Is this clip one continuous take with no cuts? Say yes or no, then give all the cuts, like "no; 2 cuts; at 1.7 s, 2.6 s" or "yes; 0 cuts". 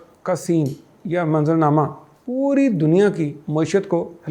yes; 0 cuts